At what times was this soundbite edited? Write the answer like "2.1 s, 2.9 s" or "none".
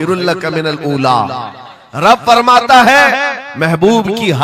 none